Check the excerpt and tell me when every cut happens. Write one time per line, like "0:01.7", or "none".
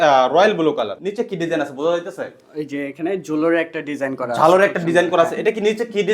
0:01.0